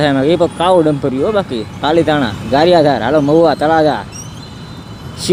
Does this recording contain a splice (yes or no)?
no